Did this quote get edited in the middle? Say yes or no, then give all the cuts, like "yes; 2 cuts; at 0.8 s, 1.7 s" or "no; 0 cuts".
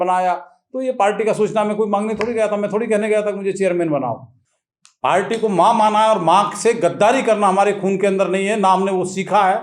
yes; 1 cut; at 4.3 s